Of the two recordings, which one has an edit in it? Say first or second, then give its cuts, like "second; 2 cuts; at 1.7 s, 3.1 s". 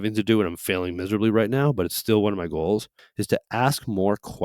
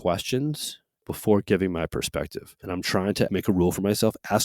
second; 2 cuts; at 1.0 s, 2.9 s